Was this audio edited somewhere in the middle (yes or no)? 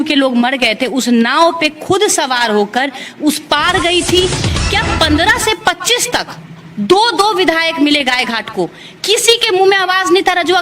yes